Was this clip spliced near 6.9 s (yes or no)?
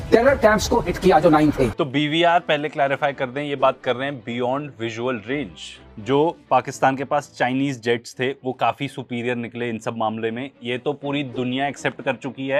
no